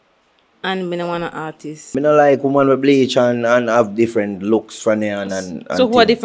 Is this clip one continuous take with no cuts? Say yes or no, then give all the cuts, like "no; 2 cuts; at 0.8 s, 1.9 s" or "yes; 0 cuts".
no; 1 cut; at 1.9 s